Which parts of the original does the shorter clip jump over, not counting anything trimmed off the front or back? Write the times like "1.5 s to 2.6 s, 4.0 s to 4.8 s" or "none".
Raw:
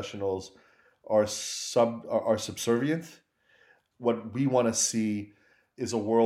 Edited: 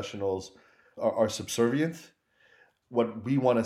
0.9 s to 2.0 s